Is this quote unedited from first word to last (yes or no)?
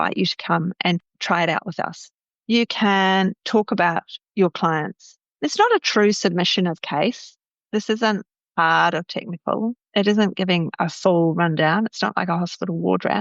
no